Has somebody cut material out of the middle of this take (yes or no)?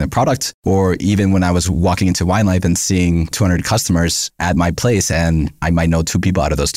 no